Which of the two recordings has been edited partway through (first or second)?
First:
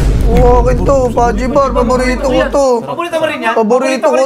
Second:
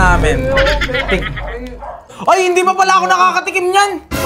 second